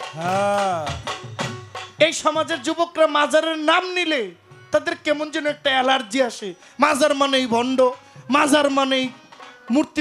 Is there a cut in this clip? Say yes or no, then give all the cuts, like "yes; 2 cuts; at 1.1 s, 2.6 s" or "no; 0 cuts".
no; 0 cuts